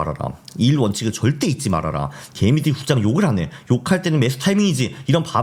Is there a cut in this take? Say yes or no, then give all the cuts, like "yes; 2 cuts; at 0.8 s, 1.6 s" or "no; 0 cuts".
no; 0 cuts